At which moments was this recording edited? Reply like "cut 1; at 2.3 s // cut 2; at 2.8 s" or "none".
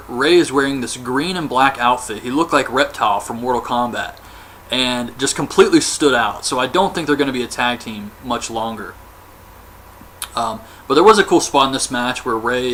none